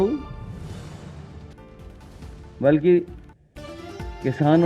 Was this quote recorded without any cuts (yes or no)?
no